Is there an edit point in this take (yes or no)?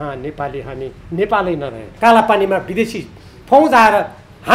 yes